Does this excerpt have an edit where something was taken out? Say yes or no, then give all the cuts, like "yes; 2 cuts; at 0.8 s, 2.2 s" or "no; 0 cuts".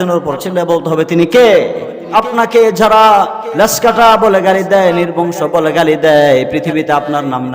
yes; 1 cut; at 2.0 s